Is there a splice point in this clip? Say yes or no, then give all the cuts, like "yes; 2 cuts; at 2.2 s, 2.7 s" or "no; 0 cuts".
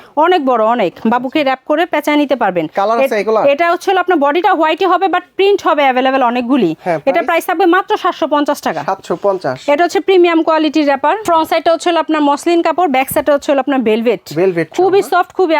no; 0 cuts